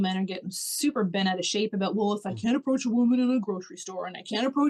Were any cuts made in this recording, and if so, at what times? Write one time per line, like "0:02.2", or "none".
none